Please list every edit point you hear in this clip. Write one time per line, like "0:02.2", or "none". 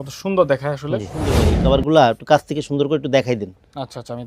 0:01.5